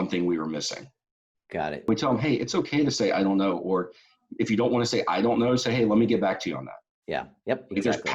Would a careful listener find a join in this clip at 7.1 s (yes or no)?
no